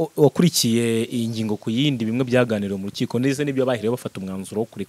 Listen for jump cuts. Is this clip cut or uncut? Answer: uncut